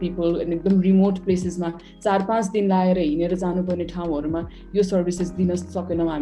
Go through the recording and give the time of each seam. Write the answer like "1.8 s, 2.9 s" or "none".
none